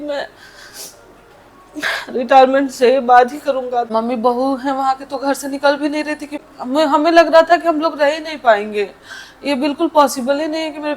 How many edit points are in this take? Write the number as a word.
two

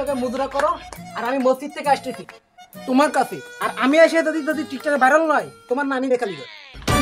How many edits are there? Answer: zero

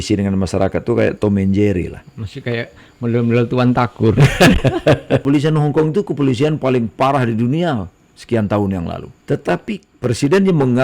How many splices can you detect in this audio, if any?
three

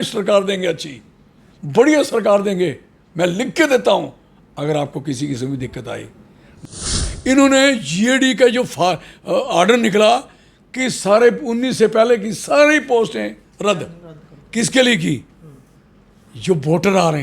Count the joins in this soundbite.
one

